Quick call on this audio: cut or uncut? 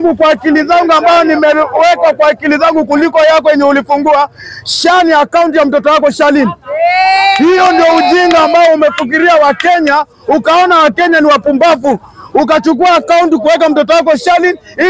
uncut